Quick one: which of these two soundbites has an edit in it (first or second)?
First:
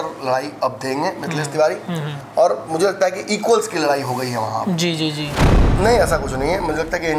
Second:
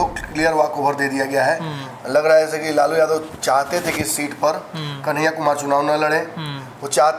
first